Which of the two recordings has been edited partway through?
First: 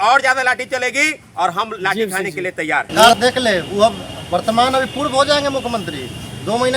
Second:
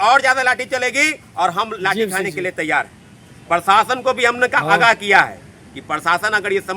first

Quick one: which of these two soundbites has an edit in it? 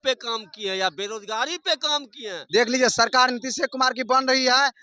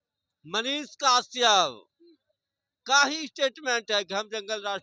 first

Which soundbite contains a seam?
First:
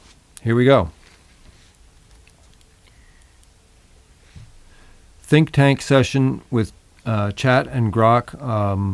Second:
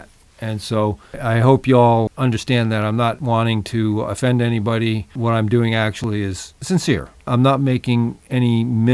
second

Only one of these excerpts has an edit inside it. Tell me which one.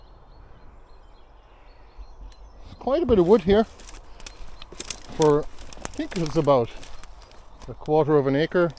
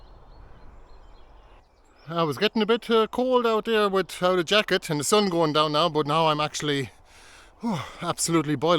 second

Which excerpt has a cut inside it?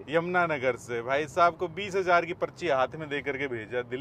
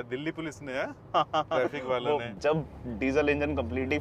second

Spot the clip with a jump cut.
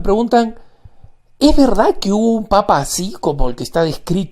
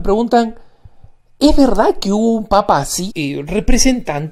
first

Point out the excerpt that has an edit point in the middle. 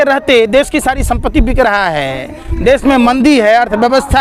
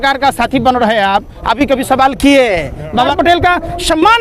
second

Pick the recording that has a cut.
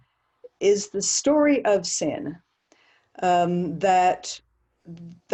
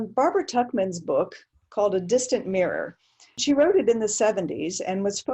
second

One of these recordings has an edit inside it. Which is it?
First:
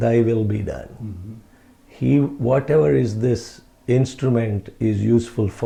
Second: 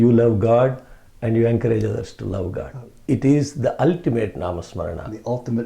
second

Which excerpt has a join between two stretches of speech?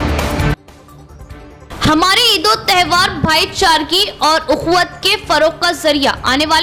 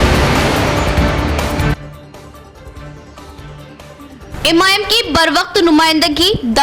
second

